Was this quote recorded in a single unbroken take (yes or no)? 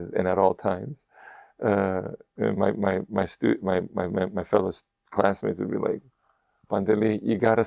yes